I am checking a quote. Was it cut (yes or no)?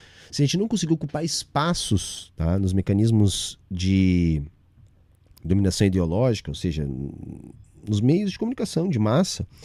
no